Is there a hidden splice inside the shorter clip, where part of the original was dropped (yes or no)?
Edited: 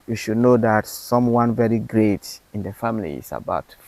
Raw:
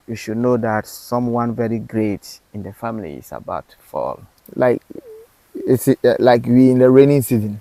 no